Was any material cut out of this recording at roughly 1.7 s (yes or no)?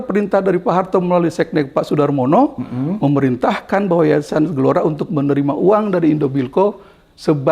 no